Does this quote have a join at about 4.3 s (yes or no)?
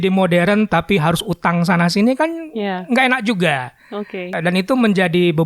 yes